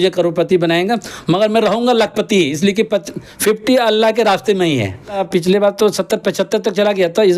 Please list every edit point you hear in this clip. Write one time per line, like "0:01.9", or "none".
0:05.2